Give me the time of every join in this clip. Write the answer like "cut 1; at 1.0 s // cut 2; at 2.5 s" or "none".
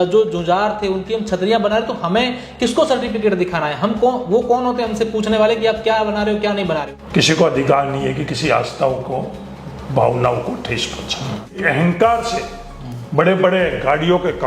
cut 1; at 7.0 s // cut 2; at 11.6 s